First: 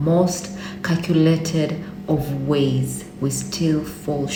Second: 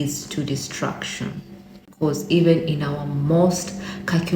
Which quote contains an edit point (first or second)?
second